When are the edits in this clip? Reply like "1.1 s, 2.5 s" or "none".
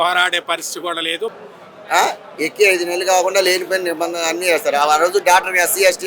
1.3 s